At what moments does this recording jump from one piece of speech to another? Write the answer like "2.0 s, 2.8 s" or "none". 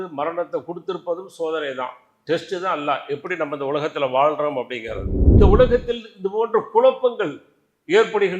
5.2 s

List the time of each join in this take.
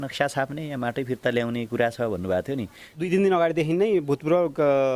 2.9 s

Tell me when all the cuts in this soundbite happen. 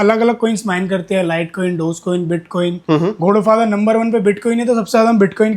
none

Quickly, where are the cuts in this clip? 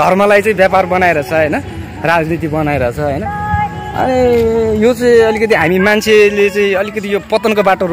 none

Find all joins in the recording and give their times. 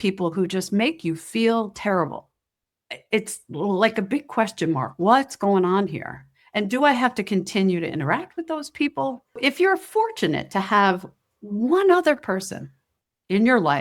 9.4 s

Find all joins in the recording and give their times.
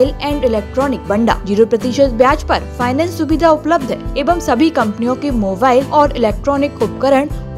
1.1 s, 4.1 s, 5.9 s

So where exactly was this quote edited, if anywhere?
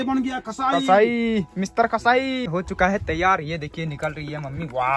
2.5 s

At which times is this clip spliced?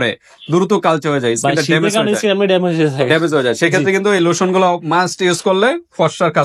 none

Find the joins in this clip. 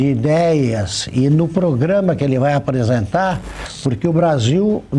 none

